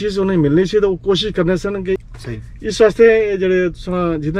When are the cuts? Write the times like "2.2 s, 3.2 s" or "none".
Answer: 2.0 s